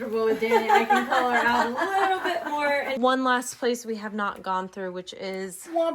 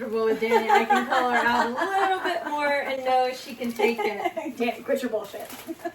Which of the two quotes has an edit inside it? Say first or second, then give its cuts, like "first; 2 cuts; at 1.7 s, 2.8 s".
first; 1 cut; at 3.0 s